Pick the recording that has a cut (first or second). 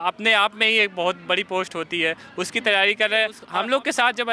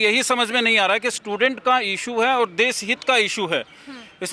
first